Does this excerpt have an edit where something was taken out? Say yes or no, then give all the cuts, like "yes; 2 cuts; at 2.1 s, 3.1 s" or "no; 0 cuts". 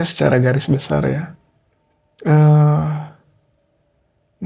no; 0 cuts